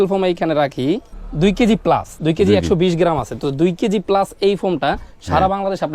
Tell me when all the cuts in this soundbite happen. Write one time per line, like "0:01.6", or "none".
0:01.2